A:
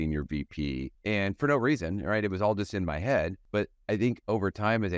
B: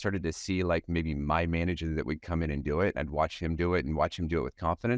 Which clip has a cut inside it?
A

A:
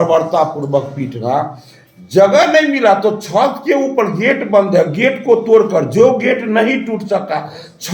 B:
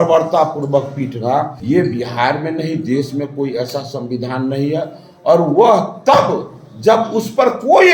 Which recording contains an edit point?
B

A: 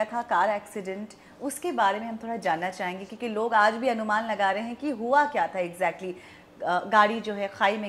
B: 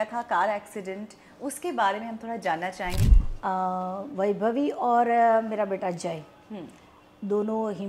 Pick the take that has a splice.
B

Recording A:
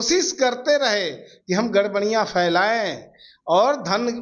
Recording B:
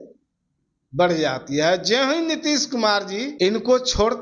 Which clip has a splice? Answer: B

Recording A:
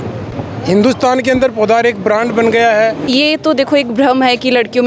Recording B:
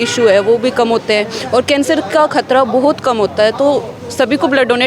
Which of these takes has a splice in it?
A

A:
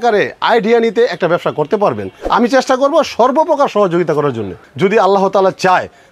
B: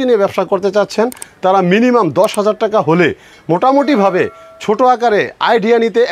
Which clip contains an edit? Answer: A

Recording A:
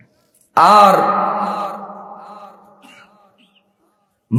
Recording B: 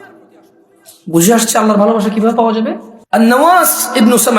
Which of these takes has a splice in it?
B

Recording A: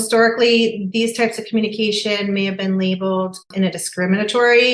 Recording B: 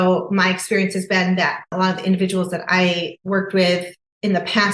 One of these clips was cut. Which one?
B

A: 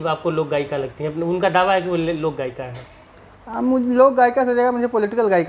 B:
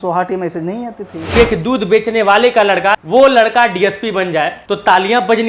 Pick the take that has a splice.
B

